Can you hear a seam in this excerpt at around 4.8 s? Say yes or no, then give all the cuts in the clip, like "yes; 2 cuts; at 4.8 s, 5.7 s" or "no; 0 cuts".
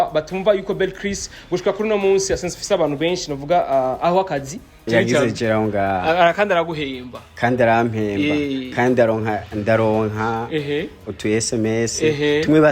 yes; 1 cut; at 4.8 s